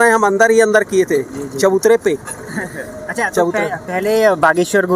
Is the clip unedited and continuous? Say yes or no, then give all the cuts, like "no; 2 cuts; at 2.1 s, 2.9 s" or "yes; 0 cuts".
yes; 0 cuts